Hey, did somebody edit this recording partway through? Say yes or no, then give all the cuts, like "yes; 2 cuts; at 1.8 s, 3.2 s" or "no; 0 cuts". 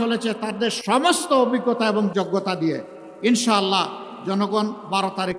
no; 0 cuts